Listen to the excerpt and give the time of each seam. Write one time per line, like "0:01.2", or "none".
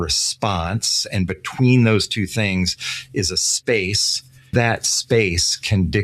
0:01.0
0:04.5